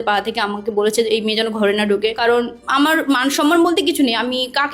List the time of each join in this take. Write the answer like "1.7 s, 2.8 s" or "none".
2.2 s